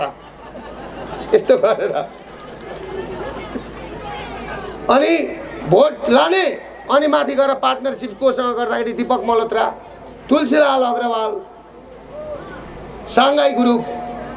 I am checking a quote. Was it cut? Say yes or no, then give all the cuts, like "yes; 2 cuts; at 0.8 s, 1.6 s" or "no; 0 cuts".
no; 0 cuts